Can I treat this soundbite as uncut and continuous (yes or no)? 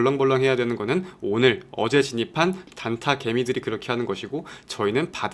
no